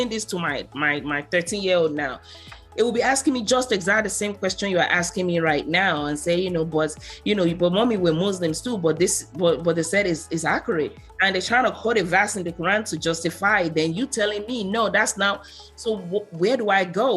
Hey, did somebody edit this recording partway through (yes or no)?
no